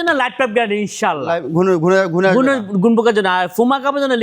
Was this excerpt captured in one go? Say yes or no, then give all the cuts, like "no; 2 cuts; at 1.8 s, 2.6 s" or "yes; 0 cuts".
yes; 0 cuts